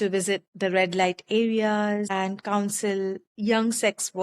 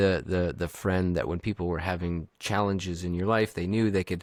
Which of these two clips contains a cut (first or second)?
first